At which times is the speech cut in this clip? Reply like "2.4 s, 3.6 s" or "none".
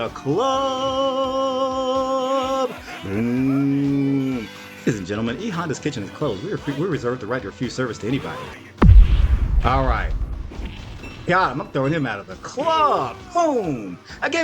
8.5 s

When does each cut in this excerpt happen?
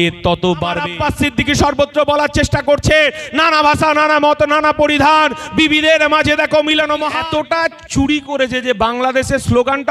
0.8 s, 7.1 s

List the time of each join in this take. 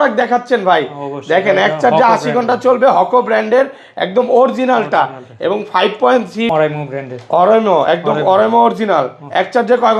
6.5 s

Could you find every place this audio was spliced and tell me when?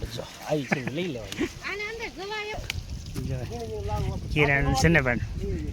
2.5 s

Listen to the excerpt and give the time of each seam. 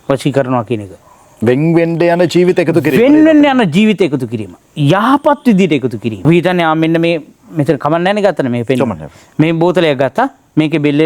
6.2 s

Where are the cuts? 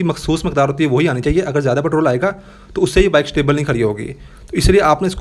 none

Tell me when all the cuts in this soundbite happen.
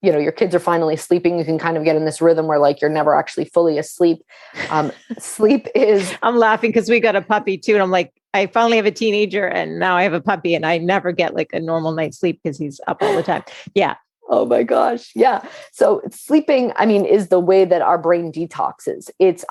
none

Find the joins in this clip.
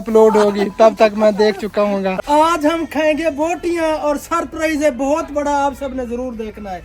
2.2 s

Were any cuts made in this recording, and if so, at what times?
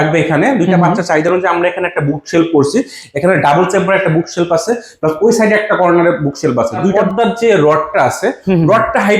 7.0 s

